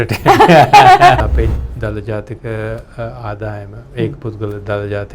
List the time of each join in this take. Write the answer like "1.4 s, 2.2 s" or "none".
1.2 s